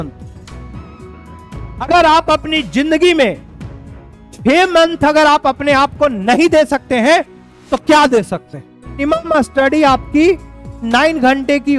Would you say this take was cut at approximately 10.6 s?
no; 1 cut; at 9.0 s

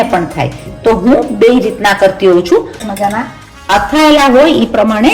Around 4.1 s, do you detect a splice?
no; 1 cut; at 2.5 s

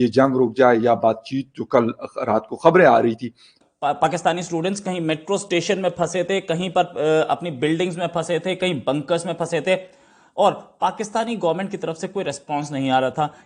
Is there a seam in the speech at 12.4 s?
no; 1 cut; at 3.6 s

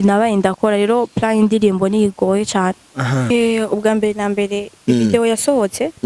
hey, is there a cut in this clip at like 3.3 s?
yes; 1 cut; at 3.3 s

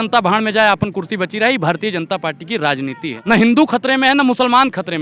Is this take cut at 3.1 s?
yes; 1 cut; at 3.1 s

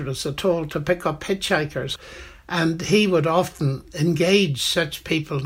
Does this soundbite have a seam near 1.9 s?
yes; 1 cut; at 1.9 s

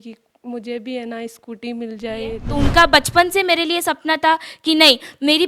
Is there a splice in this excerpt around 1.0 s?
no; 1 cut; at 2.4 s

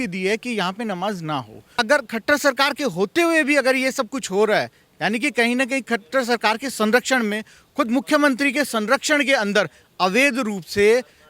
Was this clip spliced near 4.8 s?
no; 1 cut; at 1.8 s

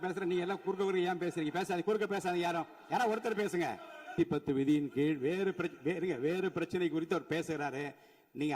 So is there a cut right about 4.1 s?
yes; 1 cut; at 4.1 s

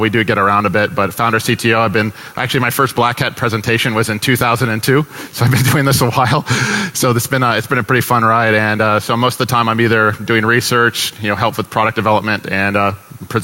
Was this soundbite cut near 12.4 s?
no; 0 cuts

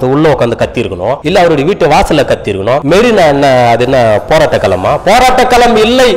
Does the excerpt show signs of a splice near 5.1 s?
no; 2 cuts; at 1.2 s, 2.8 s

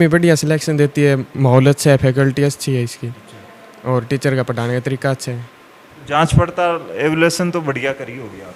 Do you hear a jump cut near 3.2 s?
no; 0 cuts

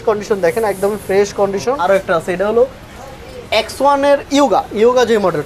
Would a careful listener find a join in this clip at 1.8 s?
yes; 1 cut; at 1.8 s

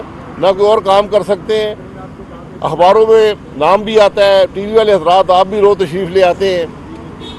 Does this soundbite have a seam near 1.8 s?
no; 0 cuts

